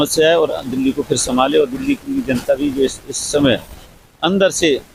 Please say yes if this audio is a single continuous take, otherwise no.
yes